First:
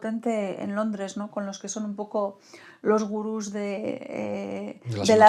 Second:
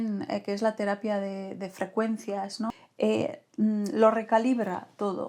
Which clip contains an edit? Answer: second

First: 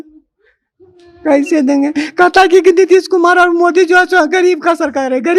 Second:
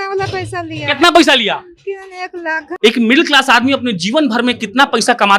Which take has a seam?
second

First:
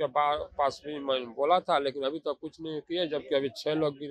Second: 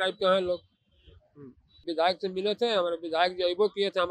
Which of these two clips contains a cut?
second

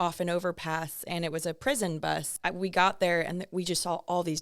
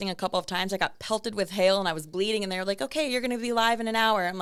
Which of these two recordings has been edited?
first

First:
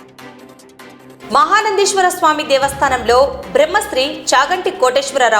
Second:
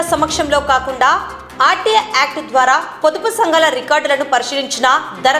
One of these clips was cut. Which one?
first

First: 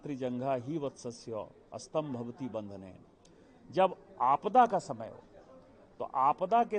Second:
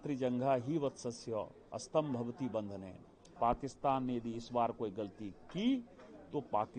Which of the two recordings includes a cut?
second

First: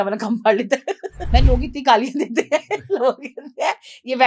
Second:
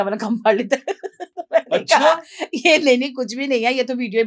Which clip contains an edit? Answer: first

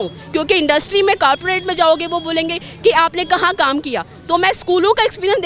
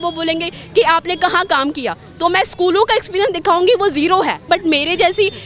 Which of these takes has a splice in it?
second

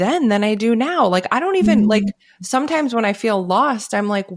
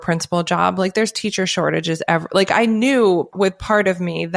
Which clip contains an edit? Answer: second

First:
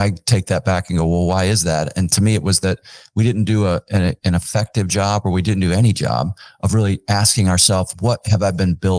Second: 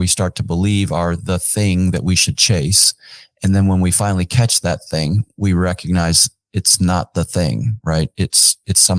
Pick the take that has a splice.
first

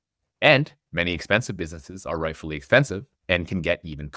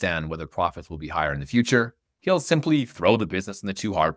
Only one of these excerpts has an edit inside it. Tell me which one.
second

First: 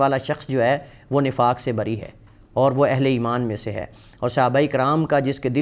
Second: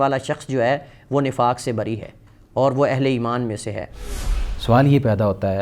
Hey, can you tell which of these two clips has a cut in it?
second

